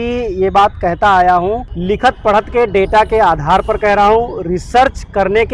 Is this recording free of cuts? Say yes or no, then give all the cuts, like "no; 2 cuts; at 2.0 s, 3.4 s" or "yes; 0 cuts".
no; 1 cut; at 1.7 s